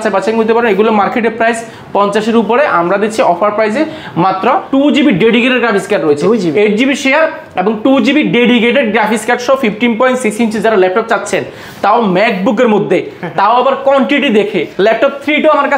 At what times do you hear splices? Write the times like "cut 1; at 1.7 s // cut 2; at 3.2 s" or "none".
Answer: cut 1; at 4.6 s // cut 2; at 14.7 s